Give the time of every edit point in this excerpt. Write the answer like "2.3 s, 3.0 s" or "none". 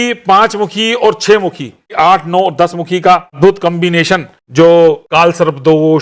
1.9 s, 3.4 s, 4.4 s, 5.0 s